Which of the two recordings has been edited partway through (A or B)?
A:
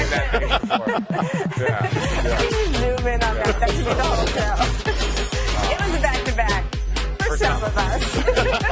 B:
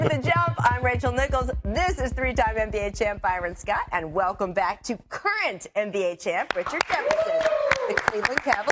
A